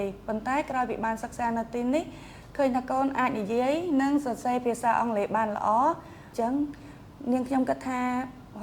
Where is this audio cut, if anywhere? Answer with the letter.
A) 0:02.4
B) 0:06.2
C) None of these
B